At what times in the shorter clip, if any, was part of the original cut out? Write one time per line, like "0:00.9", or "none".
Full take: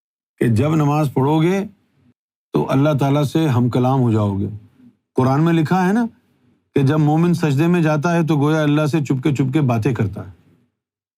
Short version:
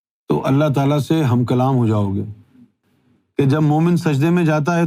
0:02.8